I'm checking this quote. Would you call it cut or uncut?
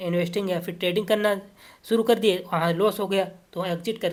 uncut